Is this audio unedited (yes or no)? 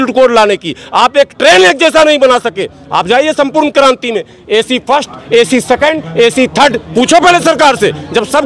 yes